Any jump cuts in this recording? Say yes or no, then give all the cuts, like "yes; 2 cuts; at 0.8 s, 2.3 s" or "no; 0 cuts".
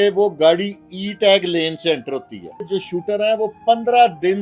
yes; 1 cut; at 2.7 s